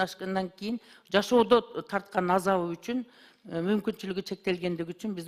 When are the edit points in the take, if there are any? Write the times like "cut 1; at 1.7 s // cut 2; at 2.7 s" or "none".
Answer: none